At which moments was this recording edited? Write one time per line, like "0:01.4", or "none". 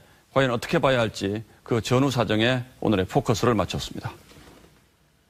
none